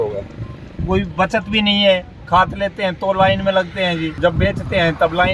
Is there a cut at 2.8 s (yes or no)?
no